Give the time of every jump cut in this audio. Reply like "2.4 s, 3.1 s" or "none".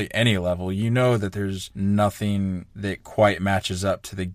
1.6 s, 2.7 s